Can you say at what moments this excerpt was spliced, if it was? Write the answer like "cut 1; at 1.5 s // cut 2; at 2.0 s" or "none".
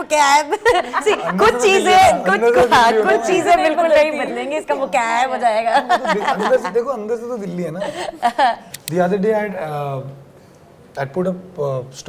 cut 1; at 8.7 s

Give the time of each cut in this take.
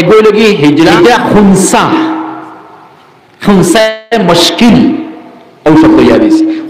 cut 1; at 0.9 s

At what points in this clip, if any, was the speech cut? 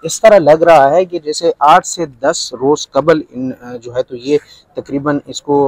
none

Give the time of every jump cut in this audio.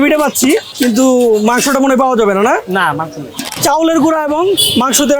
cut 1; at 3.5 s

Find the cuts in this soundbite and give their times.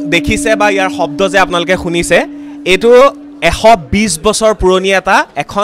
none

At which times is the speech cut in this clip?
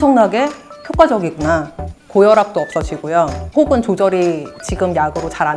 cut 1; at 1.9 s

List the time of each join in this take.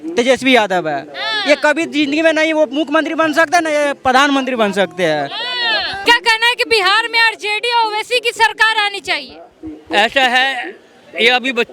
cut 1; at 6.0 s

